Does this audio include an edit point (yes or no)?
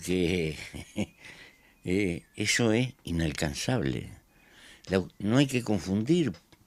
yes